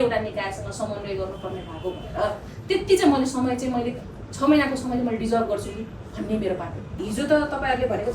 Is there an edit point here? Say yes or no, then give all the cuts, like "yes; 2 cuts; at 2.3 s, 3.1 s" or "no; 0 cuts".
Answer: yes; 1 cut; at 7.0 s